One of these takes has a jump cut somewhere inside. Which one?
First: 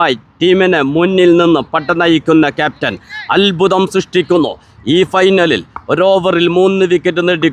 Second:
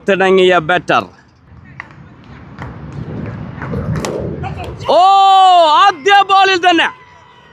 second; 1 cut; at 1.4 s

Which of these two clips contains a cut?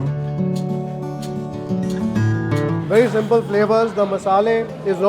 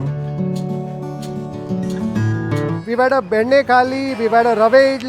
second; 1 cut; at 2.8 s

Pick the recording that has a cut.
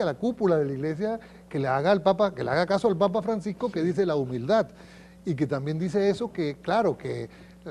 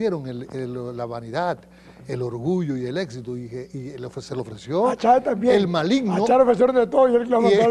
first; 1 cut; at 6.3 s

